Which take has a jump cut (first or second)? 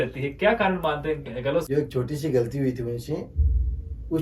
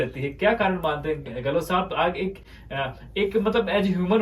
first